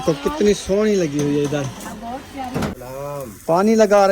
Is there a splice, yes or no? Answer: yes